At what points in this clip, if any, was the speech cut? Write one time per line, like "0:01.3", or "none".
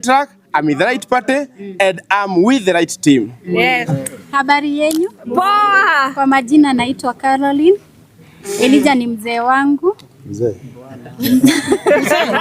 0:03.9